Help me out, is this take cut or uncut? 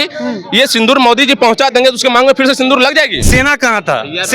cut